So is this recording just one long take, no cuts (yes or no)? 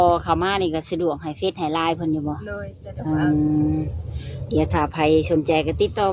yes